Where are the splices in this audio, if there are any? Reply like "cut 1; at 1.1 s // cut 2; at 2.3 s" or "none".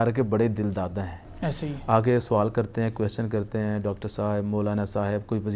none